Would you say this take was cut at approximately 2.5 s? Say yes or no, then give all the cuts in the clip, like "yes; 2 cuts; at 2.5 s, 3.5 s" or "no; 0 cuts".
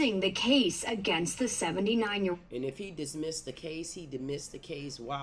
no; 0 cuts